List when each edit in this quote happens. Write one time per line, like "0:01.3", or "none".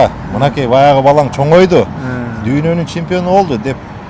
none